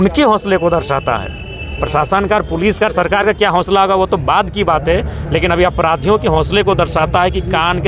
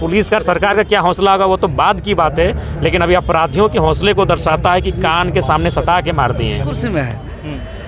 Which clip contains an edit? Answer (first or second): second